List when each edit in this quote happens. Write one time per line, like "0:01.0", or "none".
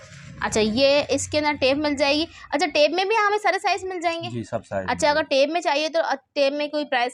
none